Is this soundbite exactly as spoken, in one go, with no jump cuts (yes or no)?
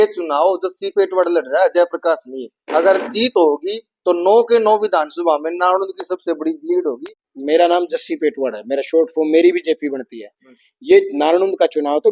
no